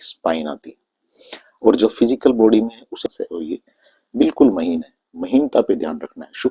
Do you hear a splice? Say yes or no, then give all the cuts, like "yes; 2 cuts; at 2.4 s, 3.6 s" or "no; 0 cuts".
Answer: yes; 1 cut; at 3.0 s